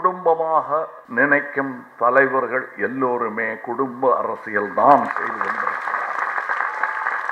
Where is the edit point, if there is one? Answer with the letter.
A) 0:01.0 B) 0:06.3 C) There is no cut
A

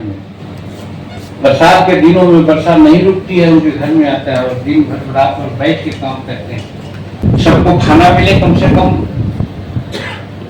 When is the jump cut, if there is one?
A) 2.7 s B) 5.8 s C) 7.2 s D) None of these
C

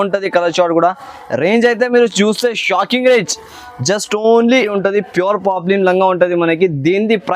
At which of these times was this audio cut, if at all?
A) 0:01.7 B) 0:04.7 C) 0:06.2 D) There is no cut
B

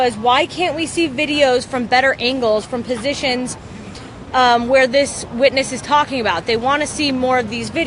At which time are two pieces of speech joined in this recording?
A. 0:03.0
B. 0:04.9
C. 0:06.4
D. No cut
A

